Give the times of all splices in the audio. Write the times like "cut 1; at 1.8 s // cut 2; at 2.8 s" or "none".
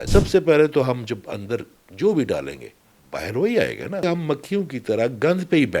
cut 1; at 4.0 s